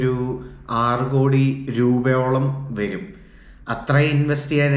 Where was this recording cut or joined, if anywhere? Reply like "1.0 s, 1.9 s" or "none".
1.6 s